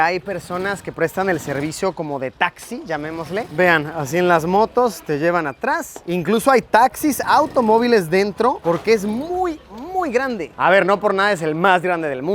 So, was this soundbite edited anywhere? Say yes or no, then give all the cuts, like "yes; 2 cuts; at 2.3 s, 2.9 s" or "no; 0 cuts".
no; 0 cuts